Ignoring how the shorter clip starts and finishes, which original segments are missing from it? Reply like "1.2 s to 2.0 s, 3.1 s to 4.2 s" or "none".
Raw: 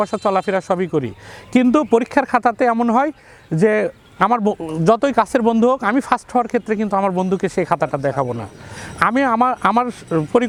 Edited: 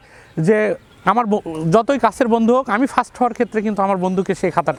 none